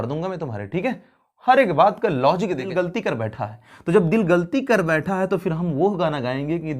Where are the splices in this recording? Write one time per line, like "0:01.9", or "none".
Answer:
0:02.7

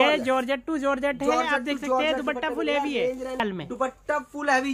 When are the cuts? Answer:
0:03.4

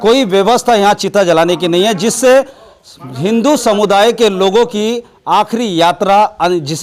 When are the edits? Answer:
none

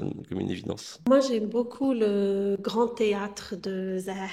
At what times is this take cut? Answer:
0:00.9

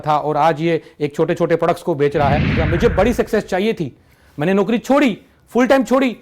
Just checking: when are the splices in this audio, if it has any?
0:02.6

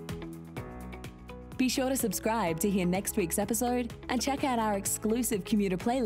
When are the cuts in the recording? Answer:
0:01.5

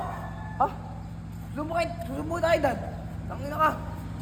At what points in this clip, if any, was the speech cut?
none

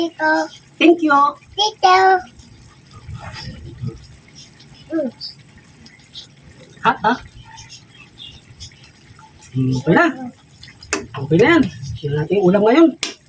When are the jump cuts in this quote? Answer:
none

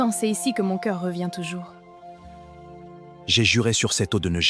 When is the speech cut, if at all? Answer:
none

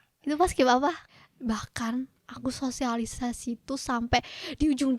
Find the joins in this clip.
0:01.0

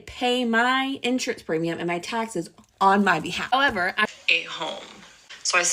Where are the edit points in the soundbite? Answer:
0:04.1

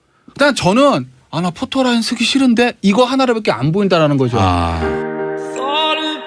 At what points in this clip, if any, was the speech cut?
0:04.7

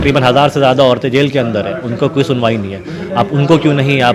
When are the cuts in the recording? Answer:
none

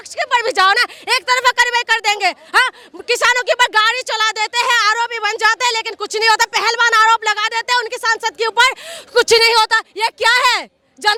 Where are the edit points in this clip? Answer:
none

